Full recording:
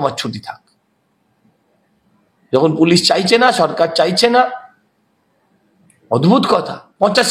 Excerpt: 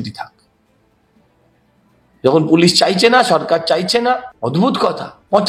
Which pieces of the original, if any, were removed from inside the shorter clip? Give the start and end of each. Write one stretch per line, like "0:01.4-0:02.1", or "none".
0:04.6-0:06.0